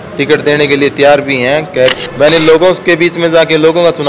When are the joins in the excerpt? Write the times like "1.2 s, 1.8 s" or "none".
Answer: 1.9 s